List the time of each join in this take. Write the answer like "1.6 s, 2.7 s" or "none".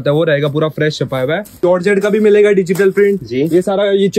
1.6 s